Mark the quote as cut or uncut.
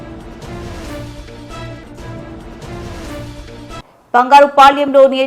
uncut